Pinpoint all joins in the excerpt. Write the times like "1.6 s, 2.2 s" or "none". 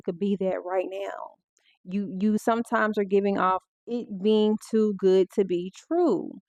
none